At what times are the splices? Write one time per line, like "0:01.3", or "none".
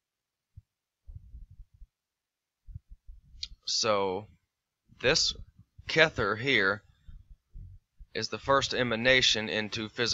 0:08.2